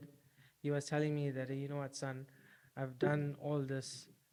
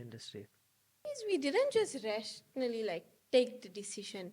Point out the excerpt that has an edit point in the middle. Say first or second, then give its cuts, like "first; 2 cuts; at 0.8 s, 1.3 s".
second; 1 cut; at 1.2 s